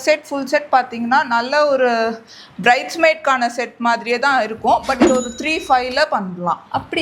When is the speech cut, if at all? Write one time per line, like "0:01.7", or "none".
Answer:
none